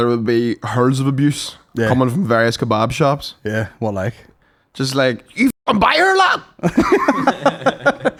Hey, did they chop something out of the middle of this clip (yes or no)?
no